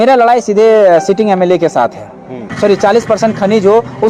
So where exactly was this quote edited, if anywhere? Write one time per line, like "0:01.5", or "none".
0:02.5